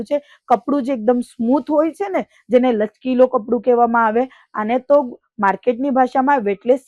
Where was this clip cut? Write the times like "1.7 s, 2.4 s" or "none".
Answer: none